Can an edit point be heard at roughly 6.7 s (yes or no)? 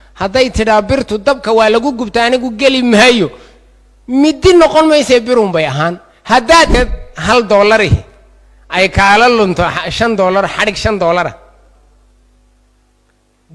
yes